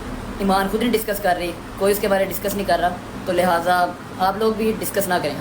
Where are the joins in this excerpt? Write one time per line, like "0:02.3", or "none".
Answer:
none